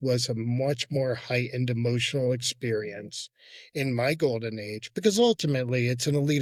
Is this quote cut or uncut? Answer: uncut